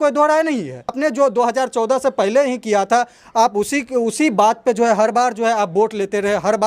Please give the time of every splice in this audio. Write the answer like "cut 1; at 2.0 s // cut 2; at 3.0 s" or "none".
cut 1; at 1.0 s